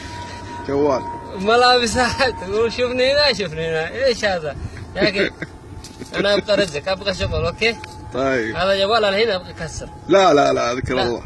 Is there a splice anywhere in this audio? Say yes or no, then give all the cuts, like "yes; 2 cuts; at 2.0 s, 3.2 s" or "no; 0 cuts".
no; 0 cuts